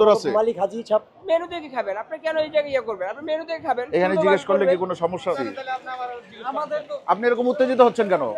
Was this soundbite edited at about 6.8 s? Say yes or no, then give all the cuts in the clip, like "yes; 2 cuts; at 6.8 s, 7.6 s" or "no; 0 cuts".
no; 2 cuts; at 1.1 s, 5.5 s